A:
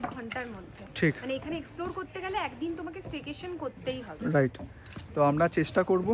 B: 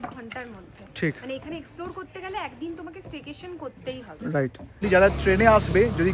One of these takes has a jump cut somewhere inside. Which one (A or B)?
B